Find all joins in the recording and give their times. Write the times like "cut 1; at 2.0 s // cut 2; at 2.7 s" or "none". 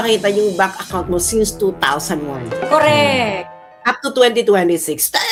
none